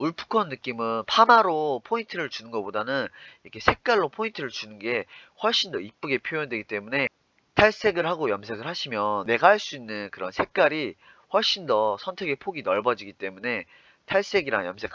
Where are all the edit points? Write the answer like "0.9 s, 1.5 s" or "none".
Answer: 9.2 s